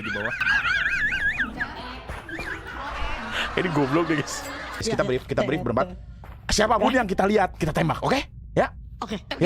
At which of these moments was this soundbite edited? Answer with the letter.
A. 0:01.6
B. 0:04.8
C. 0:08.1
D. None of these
B